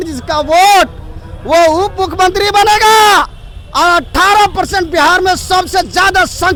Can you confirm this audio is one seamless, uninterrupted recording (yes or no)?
yes